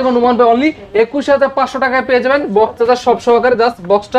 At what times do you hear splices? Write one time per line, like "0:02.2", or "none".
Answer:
none